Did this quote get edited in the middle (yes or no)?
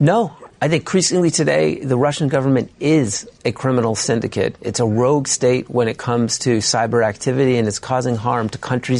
no